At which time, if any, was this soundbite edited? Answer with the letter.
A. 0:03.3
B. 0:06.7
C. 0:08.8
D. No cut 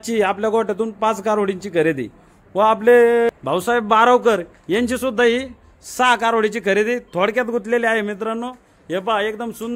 A